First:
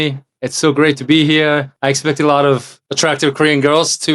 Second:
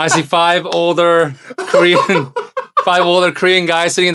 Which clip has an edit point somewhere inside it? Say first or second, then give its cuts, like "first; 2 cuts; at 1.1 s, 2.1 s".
first; 2 cuts; at 1.7 s, 2.8 s